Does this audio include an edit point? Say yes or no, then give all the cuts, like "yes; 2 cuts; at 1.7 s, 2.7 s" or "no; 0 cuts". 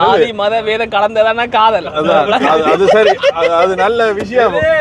no; 0 cuts